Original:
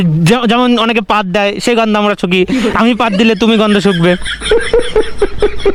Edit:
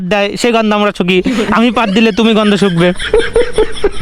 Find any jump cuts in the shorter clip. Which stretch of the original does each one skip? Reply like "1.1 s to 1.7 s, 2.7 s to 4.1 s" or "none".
4.2 s to 4.4 s